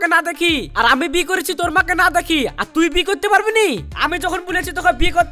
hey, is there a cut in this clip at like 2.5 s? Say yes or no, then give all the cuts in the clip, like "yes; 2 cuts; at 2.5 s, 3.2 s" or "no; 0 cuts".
no; 0 cuts